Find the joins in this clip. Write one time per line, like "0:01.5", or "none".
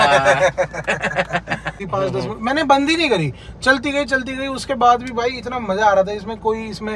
0:01.8